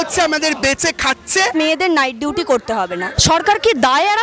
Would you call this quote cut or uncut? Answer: cut